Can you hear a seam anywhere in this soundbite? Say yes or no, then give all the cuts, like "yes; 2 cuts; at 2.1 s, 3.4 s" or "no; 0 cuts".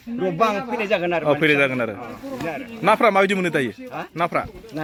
no; 0 cuts